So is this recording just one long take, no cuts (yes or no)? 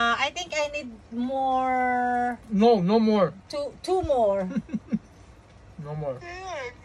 yes